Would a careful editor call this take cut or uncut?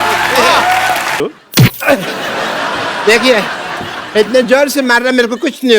cut